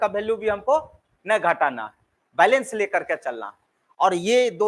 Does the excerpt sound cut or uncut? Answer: uncut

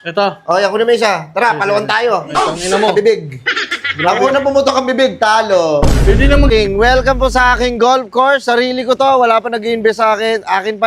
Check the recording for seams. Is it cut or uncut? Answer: cut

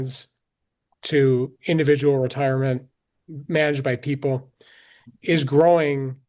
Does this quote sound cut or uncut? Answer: uncut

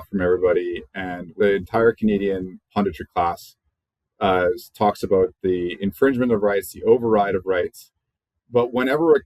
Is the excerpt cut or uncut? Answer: cut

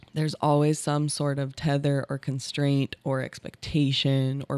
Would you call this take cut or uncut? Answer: uncut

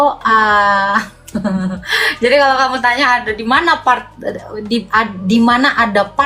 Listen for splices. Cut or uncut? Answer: uncut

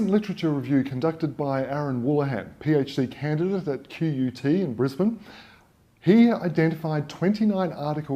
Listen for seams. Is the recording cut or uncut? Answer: cut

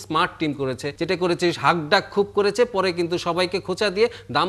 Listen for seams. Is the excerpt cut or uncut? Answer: cut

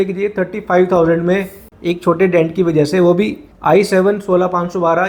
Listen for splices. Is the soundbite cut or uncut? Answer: uncut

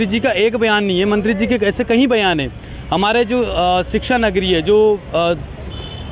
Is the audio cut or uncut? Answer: uncut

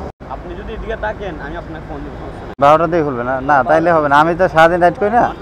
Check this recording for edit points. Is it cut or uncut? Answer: cut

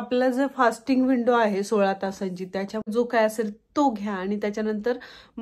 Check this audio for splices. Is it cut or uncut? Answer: cut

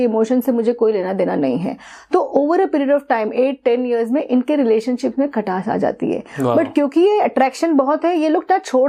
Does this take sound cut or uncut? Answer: uncut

